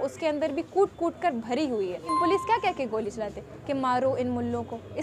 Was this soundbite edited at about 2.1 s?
yes; 1 cut; at 2.1 s

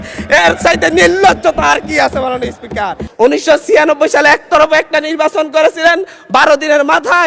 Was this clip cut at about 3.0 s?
yes; 1 cut; at 3.0 s

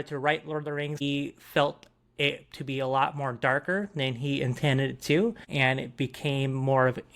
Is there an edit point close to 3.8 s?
no; 2 cuts; at 1.0 s, 5.4 s

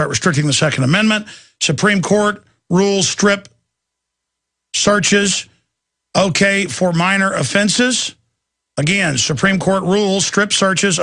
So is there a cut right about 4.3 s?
yes; 1 cut; at 4.3 s

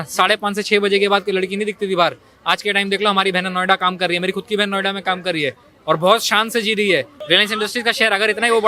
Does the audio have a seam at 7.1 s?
yes; 1 cut; at 7.1 s

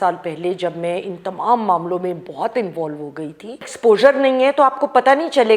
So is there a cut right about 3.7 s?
yes; 1 cut; at 3.7 s

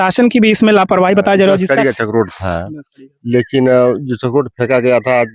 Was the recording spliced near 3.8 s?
no; 1 cut; at 1.6 s

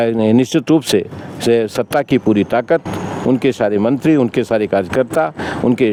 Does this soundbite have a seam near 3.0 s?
no; 0 cuts

